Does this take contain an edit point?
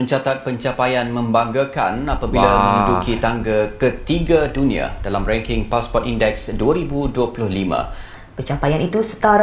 yes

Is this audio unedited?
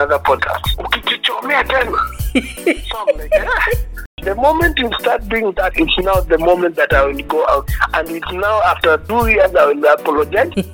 no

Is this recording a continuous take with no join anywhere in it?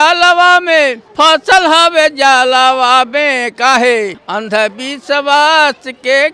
no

